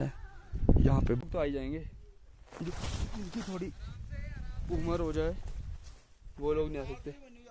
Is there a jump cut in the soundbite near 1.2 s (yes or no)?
yes